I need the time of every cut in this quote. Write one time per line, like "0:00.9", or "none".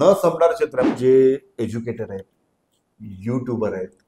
0:00.9